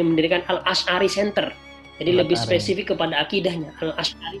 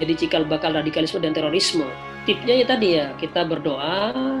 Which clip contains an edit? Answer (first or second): second